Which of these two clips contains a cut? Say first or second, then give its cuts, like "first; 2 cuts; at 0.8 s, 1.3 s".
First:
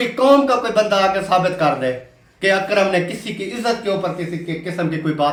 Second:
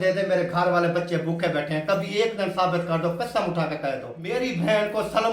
second; 1 cut; at 4.3 s